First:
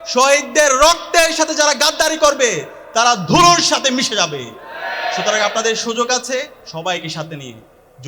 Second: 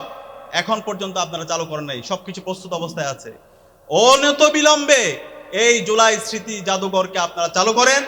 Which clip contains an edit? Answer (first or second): first